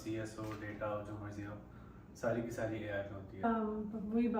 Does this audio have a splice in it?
yes; 1 cut; at 3.4 s

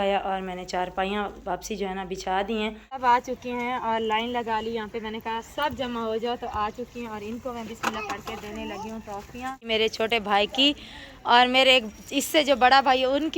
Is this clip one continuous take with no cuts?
no; 2 cuts; at 2.9 s, 9.7 s

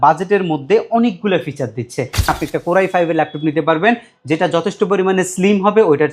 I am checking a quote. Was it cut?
yes; 1 cut; at 2.3 s

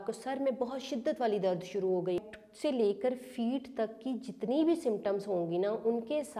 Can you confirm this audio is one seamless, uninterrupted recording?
no; 1 cut; at 2.2 s

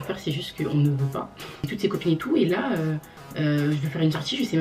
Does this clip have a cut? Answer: yes; 1 cut; at 1.7 s

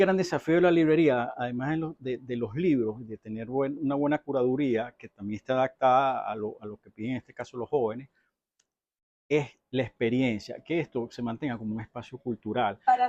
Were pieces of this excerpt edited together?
no; 0 cuts

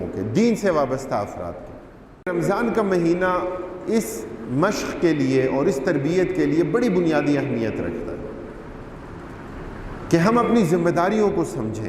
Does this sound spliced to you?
yes; 1 cut; at 2.3 s

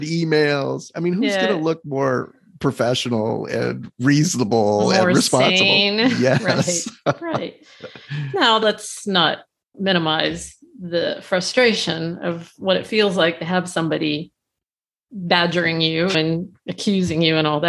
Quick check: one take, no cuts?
yes; 0 cuts

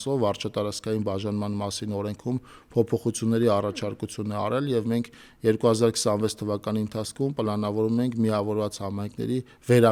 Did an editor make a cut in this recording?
no; 0 cuts

